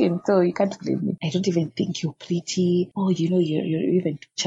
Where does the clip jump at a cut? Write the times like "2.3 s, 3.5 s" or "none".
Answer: 1.2 s, 2.9 s